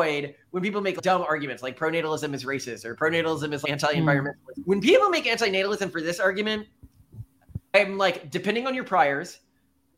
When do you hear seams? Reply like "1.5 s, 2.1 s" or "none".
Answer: 1.0 s, 3.6 s, 4.5 s, 7.7 s

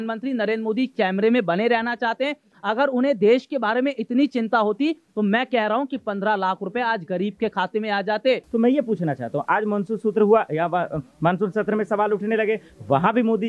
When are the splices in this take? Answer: 8.5 s

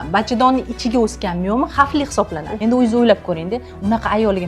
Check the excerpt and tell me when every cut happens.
2.5 s

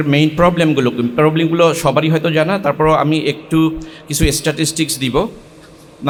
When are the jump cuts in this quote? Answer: none

